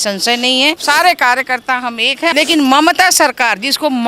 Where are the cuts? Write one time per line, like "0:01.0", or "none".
0:00.8
0:02.3